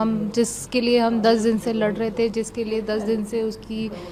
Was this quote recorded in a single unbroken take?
yes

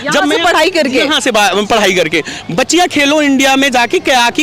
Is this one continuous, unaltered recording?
yes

